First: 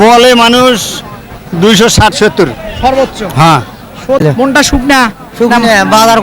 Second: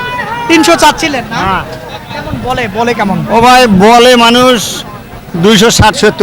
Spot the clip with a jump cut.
first; 1 cut; at 4.2 s

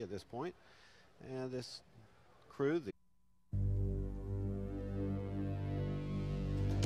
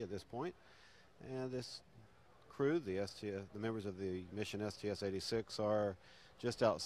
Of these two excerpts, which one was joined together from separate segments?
second; 1 cut; at 2.9 s

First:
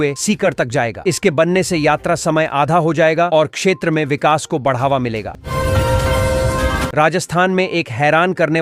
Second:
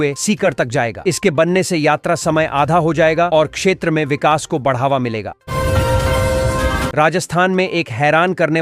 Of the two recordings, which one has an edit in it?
second; 2 cuts; at 5.3 s, 6.9 s

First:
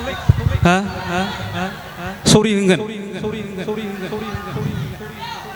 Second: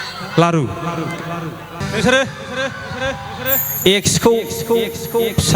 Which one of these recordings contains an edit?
second; 1 cut; at 1.8 s

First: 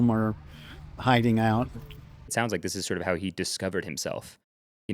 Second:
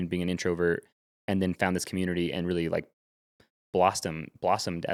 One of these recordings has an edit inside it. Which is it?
first; 1 cut; at 2.3 s

